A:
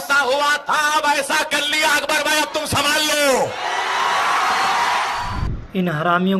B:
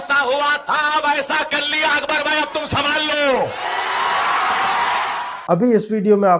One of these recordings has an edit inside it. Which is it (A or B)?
A